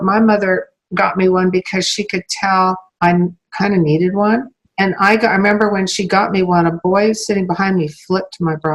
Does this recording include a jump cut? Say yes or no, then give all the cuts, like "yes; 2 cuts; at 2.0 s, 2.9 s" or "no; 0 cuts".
yes; 1 cut; at 4.7 s